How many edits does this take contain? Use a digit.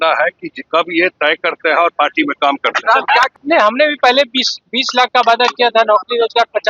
1